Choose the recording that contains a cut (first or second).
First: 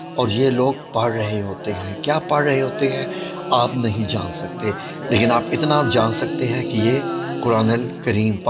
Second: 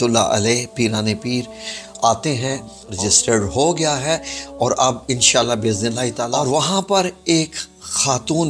second